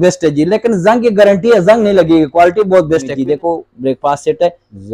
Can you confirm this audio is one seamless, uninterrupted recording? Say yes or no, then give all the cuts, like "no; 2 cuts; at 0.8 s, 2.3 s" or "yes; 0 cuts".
no; 1 cut; at 3.2 s